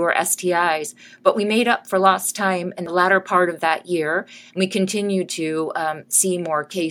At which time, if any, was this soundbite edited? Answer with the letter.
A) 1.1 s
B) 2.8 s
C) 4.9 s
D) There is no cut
B